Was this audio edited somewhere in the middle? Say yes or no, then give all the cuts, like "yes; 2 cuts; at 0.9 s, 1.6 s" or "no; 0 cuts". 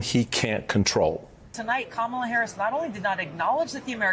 yes; 1 cut; at 1.5 s